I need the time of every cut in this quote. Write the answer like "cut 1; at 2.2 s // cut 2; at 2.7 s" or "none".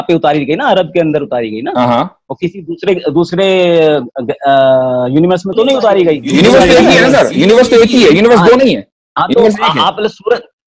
cut 1; at 6.2 s